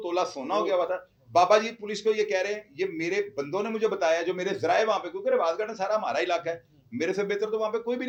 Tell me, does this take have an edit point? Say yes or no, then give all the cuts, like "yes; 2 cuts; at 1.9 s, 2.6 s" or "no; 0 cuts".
no; 0 cuts